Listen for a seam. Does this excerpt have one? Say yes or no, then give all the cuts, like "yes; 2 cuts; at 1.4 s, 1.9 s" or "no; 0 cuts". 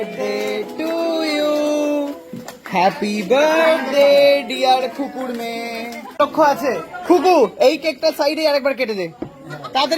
yes; 1 cut; at 6.0 s